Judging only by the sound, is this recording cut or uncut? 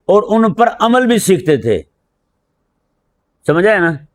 uncut